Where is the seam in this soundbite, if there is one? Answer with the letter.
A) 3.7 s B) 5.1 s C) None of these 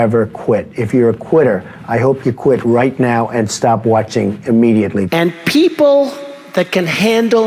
B